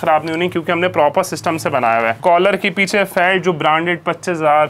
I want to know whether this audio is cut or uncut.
cut